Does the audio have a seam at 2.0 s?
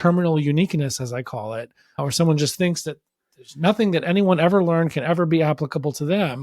yes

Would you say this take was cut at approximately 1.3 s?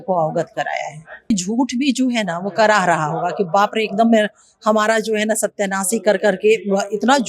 yes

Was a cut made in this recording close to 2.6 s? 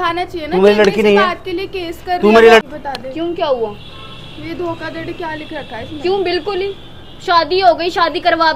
yes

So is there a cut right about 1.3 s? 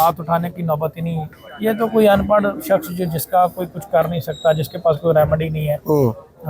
yes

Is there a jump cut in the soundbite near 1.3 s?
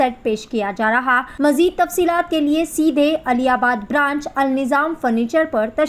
yes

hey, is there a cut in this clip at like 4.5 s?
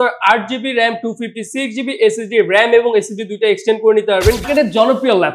yes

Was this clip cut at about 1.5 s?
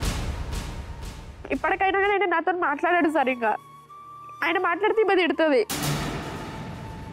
yes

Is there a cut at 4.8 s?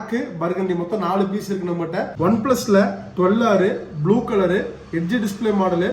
no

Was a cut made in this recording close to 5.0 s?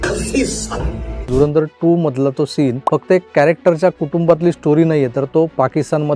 no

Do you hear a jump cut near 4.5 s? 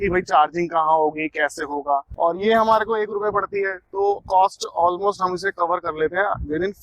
no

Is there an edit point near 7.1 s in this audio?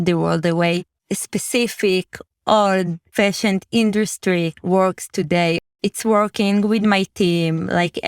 no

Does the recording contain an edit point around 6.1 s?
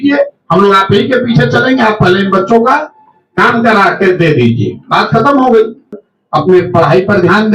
yes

